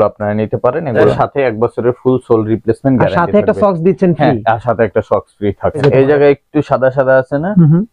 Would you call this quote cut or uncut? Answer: cut